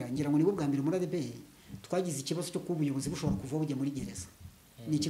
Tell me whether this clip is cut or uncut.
uncut